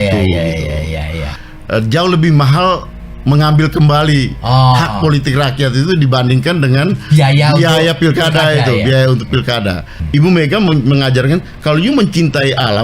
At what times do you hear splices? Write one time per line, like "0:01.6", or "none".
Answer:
0:01.3
0:10.0